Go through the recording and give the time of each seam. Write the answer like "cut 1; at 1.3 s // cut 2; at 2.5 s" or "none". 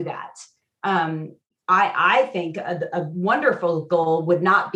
cut 1; at 1.5 s

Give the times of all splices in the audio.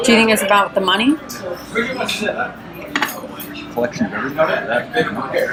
none

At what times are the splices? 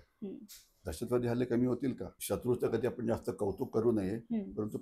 cut 1; at 2.2 s

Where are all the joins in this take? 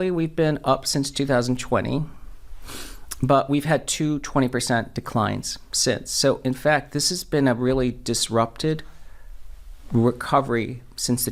none

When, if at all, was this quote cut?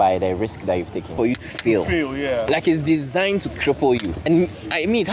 cut 1; at 1.1 s // cut 2; at 4.2 s

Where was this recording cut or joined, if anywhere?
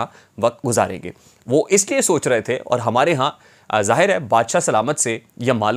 none

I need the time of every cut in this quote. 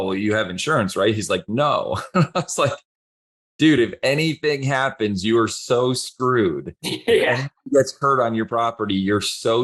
none

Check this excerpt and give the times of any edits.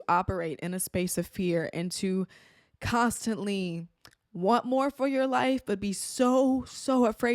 none

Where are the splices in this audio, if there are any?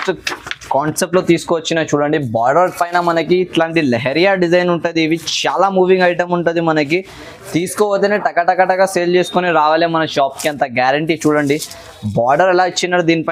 none

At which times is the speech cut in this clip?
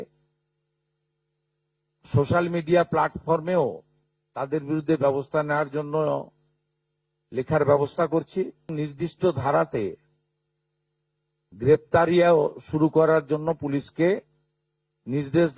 cut 1; at 8.7 s

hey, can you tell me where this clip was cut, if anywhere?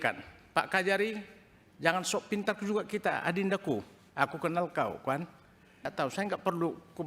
cut 1; at 5.9 s

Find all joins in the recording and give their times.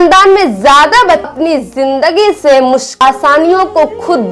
cut 1; at 1.3 s // cut 2; at 3.0 s

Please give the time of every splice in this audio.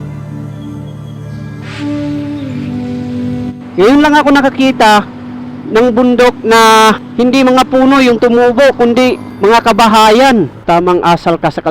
cut 1; at 10.6 s

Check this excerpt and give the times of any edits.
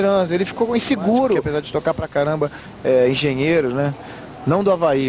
cut 1; at 1.5 s

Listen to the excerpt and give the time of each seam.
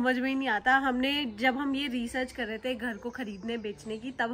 none

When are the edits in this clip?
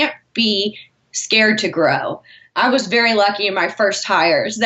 cut 1; at 2.4 s

